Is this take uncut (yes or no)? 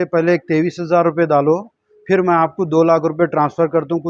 yes